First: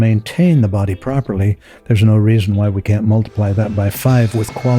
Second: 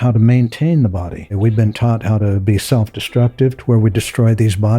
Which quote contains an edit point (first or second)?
second